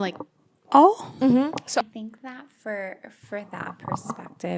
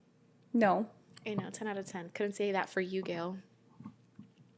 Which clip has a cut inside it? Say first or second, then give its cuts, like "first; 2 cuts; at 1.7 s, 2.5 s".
first; 1 cut; at 1.8 s